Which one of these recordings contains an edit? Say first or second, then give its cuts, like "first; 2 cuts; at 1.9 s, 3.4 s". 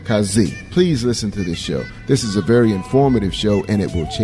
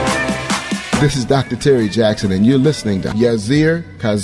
second; 1 cut; at 2.8 s